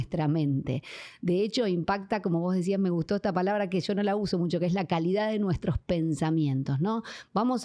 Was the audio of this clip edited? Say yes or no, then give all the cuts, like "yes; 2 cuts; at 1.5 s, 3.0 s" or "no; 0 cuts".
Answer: no; 0 cuts